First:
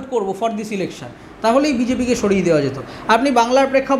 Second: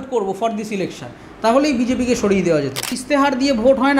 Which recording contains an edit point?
second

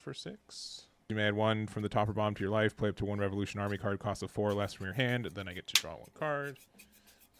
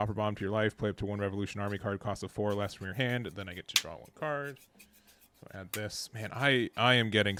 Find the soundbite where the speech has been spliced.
first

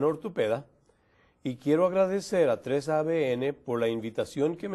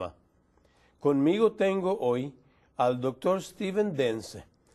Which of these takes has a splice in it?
second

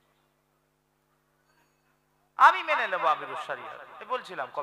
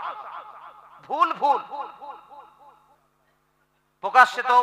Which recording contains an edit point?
second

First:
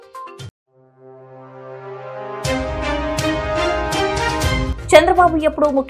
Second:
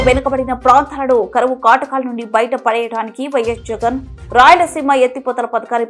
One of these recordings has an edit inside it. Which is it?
first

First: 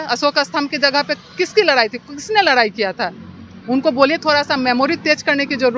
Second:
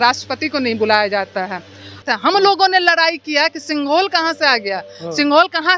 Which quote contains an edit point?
second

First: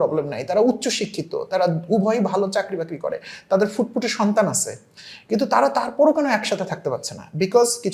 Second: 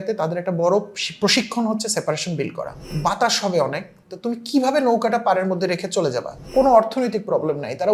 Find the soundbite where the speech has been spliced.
second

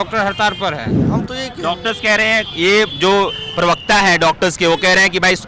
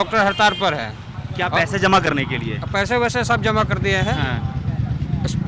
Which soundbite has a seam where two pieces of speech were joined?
first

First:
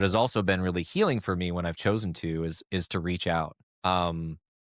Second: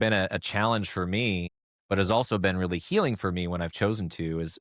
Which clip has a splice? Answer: first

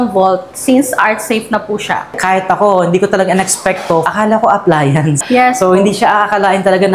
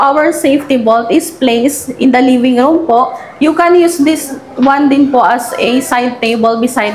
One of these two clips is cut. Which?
first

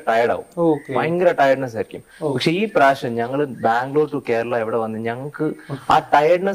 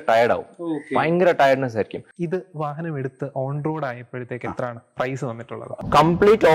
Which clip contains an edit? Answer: second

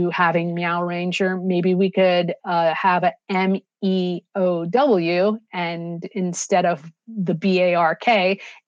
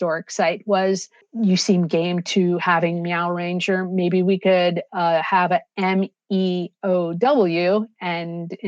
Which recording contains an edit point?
second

